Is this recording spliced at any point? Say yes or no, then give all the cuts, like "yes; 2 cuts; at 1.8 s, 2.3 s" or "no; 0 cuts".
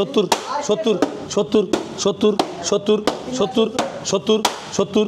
no; 0 cuts